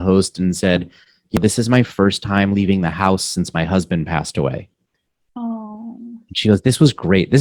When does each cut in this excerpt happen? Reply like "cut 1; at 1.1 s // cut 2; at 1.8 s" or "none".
cut 1; at 1.4 s

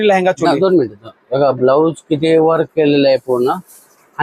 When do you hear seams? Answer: none

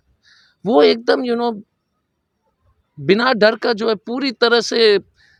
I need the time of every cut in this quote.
none

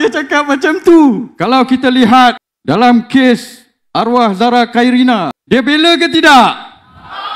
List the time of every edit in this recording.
cut 1; at 1.3 s // cut 2; at 2.5 s // cut 3; at 5.3 s

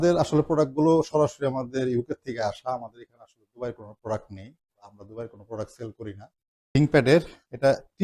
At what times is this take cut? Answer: cut 1; at 6.8 s

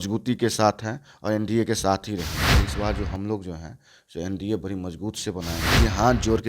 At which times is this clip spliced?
cut 1; at 2.6 s // cut 2; at 5.8 s

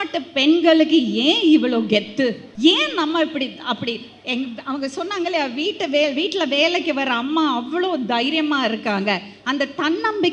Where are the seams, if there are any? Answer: cut 1; at 2.5 s

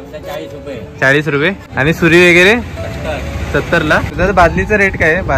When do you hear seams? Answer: cut 1; at 1.7 s // cut 2; at 4.1 s

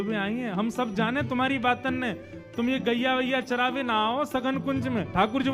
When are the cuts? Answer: none

